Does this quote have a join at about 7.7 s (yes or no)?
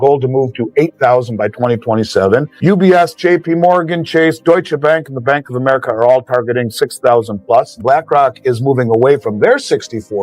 yes